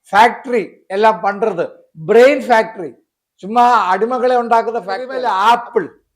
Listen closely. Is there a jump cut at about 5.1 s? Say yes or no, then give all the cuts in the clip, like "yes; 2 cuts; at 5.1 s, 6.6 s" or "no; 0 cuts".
yes; 1 cut; at 5.1 s